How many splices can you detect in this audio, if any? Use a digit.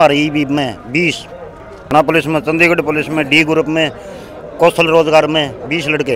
1